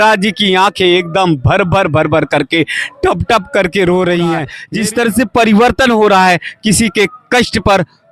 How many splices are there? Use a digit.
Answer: 1